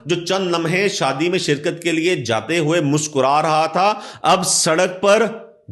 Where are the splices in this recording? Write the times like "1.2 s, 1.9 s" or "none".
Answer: none